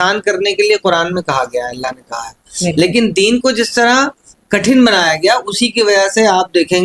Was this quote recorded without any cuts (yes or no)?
yes